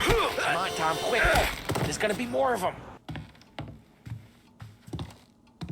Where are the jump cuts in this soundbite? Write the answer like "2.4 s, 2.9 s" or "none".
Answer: 2.9 s